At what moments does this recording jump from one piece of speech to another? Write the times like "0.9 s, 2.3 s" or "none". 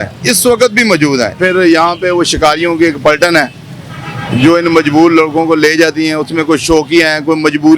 1.4 s